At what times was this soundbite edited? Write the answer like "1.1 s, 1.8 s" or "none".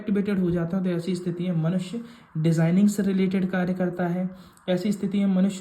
none